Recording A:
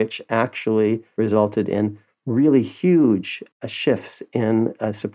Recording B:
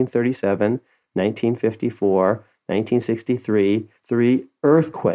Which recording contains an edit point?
A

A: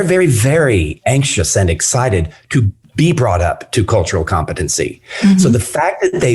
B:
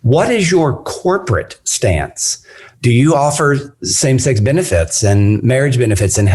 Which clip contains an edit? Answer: B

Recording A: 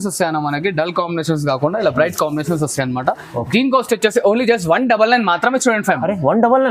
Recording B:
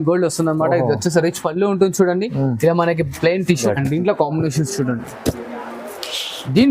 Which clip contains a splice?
B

